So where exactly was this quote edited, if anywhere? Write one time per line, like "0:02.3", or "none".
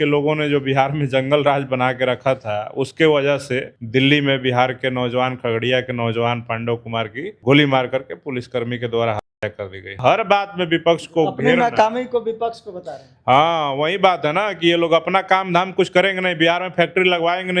0:03.7
0:07.3
0:10.0